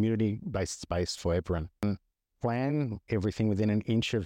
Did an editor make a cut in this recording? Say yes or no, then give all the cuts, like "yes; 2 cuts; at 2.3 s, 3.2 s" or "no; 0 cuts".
yes; 1 cut; at 1.8 s